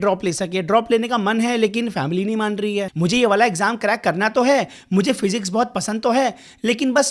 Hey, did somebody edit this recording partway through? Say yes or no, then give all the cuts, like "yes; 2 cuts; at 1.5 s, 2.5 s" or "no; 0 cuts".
yes; 1 cut; at 2.9 s